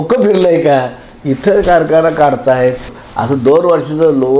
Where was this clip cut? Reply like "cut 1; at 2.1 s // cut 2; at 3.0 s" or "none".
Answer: cut 1; at 2.9 s